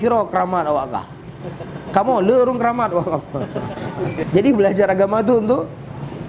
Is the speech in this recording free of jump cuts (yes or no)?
no